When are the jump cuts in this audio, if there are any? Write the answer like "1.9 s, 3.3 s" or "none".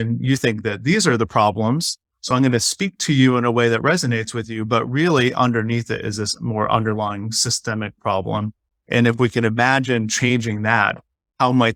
none